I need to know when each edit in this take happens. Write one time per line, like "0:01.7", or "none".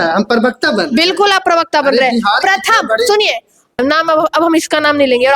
0:03.8